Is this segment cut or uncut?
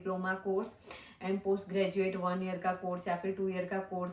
uncut